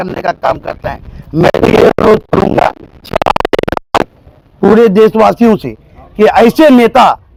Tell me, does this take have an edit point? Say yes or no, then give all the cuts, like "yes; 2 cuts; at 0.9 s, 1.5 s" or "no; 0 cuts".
no; 0 cuts